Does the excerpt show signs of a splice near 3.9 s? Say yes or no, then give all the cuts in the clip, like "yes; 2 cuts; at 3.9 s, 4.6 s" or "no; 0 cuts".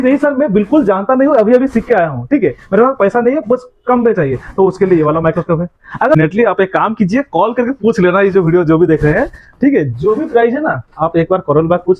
no; 1 cut; at 6.2 s